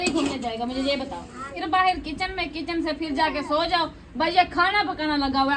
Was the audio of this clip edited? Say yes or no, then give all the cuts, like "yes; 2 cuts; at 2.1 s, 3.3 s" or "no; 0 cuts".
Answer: yes; 1 cut; at 1.6 s